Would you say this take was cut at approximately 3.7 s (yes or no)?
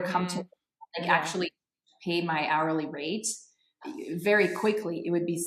no